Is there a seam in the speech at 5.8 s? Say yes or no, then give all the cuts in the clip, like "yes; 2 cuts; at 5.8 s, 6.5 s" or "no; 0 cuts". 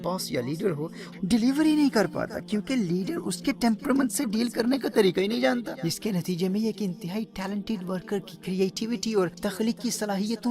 yes; 3 cuts; at 1.1 s, 5.8 s, 9.4 s